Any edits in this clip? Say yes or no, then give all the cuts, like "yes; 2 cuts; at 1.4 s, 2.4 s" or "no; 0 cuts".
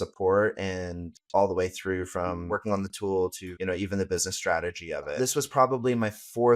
yes; 3 cuts; at 2.4 s, 3.5 s, 5.1 s